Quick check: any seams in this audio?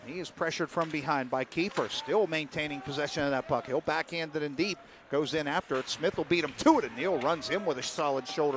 no; 0 cuts

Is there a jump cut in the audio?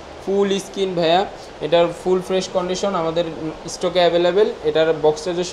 no; 0 cuts

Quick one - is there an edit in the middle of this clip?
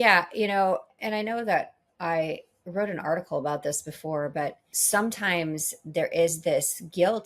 yes; 2 cuts; at 0.9 s, 4.7 s

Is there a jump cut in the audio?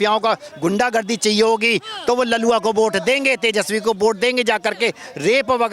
no; 0 cuts

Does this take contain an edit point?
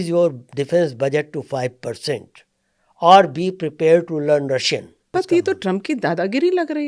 yes; 1 cut; at 5.0 s

